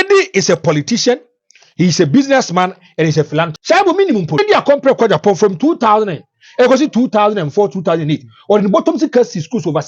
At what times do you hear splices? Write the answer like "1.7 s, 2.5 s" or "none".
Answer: 3.6 s, 4.4 s

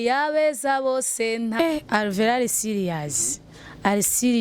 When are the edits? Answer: 1.5 s

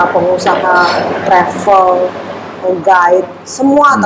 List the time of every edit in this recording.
none

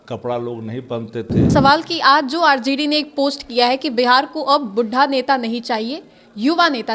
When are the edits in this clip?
1.5 s

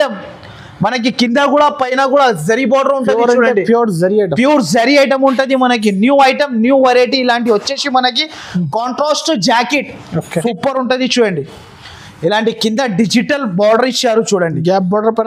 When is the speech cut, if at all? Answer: 10.4 s

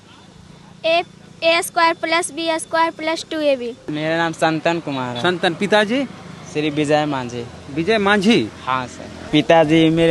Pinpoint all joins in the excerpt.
3.9 s, 9.2 s

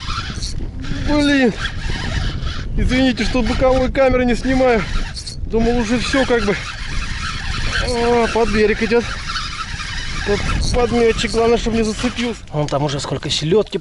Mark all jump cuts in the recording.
12.4 s

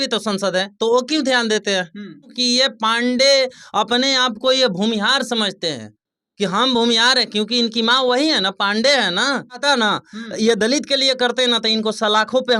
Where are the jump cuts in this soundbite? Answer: 2.4 s, 9.6 s

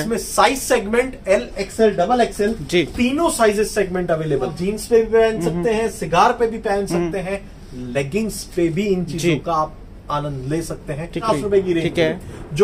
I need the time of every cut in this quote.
4.6 s, 11.2 s

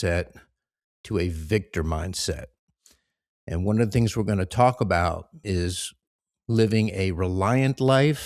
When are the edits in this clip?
5.4 s

